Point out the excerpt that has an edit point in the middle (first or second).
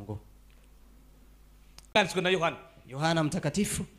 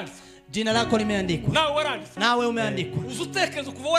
first